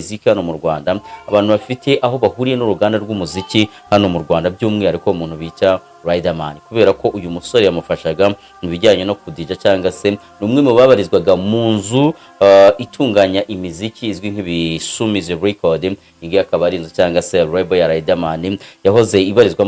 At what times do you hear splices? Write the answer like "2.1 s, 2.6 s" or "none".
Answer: none